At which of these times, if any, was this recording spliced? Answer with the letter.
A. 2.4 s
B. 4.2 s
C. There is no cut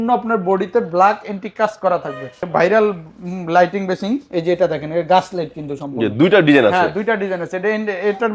A